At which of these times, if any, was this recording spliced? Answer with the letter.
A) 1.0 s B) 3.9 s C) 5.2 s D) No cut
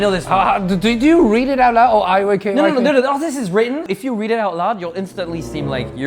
B